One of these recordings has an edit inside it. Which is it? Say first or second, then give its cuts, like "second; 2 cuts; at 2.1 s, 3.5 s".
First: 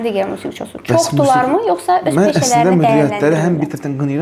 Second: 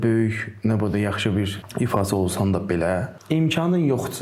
second; 2 cuts; at 1.6 s, 3.1 s